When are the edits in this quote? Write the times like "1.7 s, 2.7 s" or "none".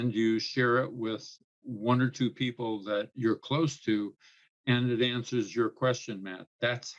none